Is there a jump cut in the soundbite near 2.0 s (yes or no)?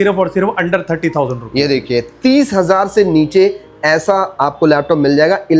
no